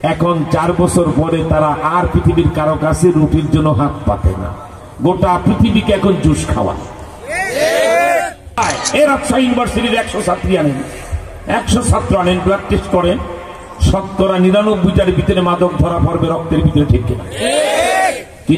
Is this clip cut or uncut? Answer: cut